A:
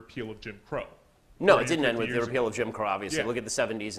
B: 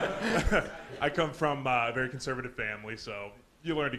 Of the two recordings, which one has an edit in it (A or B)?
B